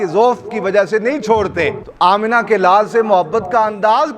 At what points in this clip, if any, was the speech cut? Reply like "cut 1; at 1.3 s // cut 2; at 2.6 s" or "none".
cut 1; at 1.8 s